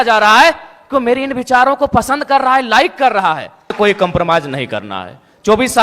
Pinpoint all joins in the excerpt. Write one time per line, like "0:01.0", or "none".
0:03.7